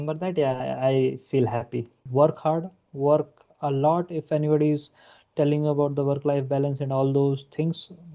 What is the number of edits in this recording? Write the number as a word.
one